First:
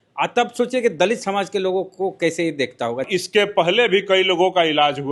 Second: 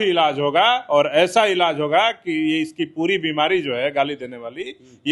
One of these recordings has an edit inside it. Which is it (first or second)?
first